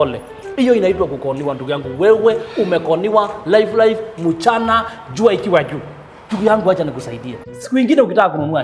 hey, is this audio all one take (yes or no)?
yes